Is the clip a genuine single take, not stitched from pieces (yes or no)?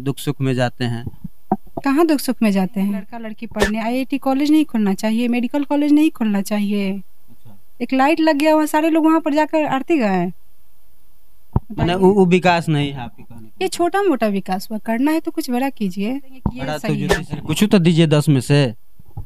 no